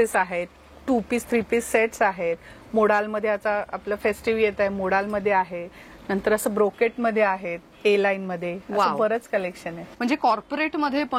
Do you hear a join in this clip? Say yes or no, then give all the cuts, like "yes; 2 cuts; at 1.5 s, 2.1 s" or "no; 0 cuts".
yes; 1 cut; at 9.9 s